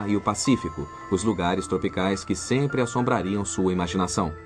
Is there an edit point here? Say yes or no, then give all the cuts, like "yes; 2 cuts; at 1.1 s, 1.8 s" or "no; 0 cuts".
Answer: no; 0 cuts